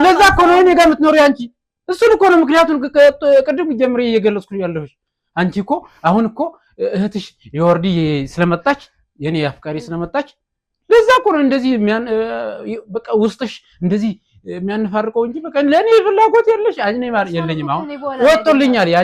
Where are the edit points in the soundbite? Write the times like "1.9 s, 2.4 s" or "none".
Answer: none